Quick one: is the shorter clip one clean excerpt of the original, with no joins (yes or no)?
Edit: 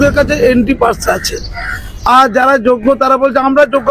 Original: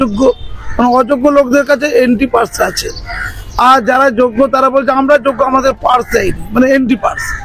yes